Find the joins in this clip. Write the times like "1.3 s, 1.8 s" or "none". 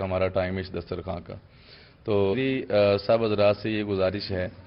2.3 s